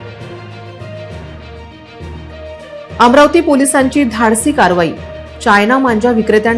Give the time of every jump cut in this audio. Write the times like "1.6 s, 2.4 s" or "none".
0.9 s